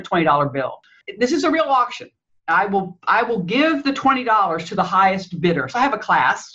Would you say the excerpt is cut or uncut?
cut